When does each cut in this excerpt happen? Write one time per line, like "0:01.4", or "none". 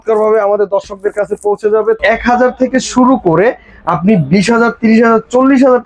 0:02.0